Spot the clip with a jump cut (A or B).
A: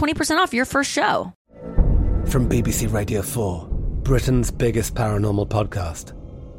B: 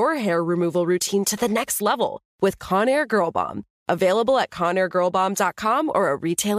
A